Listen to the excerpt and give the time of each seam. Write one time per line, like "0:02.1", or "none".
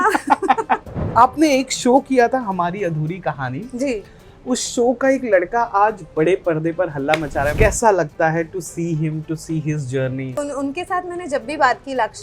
0:01.0
0:07.5
0:10.4